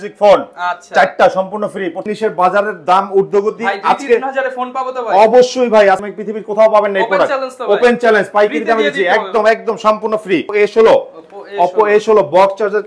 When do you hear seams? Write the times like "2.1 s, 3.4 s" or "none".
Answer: 2.1 s, 6.1 s, 10.5 s